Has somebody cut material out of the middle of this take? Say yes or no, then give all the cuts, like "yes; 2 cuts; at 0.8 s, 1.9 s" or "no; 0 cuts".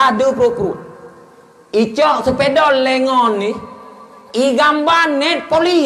no; 0 cuts